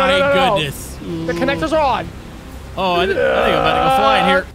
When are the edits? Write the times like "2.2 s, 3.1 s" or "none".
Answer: none

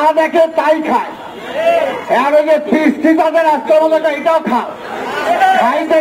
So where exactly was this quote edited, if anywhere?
none

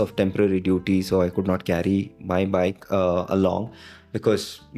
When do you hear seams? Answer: none

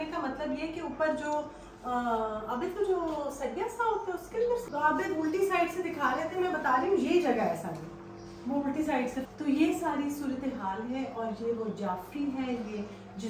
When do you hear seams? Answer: 4.6 s, 9.3 s

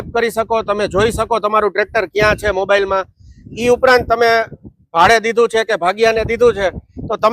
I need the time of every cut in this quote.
none

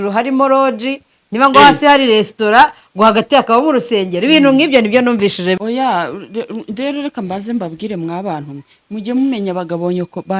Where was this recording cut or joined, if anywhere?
5.6 s

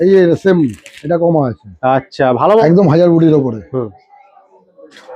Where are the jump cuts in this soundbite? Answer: 2.6 s

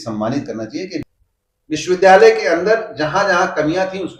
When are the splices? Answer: 1.0 s

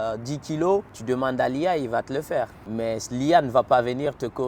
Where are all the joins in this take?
0.9 s, 2.6 s

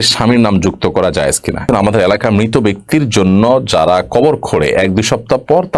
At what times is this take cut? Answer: 1.6 s

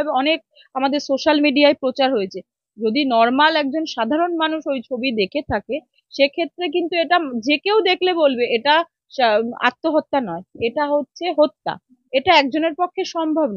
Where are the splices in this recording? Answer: 11.9 s

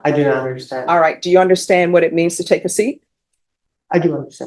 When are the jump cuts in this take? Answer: none

